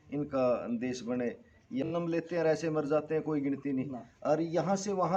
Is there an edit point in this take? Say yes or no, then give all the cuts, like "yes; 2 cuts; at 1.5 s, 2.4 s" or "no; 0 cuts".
no; 0 cuts